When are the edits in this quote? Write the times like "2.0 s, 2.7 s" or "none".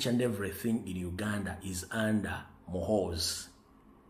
2.9 s